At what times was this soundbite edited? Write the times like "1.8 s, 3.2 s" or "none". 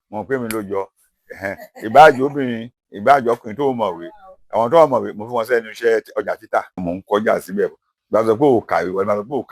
6.8 s, 7.9 s